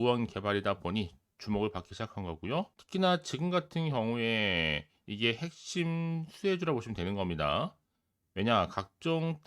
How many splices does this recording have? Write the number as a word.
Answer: one